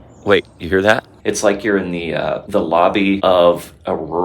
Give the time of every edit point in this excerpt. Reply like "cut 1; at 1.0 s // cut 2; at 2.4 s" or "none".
cut 1; at 1.1 s // cut 2; at 2.4 s // cut 3; at 3.2 s